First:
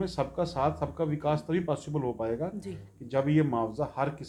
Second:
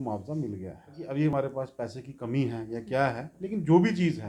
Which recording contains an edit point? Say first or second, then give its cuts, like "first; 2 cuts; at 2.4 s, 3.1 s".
second; 1 cut; at 1.3 s